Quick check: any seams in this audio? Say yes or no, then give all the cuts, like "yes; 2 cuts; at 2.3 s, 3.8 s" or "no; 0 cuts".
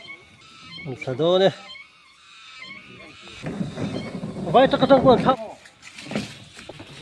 yes; 1 cut; at 5.4 s